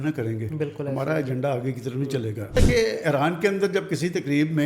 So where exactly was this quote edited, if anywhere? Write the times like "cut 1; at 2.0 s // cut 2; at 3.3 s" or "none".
cut 1; at 2.6 s